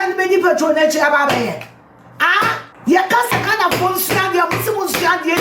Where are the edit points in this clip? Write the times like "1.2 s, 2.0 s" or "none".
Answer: 2.7 s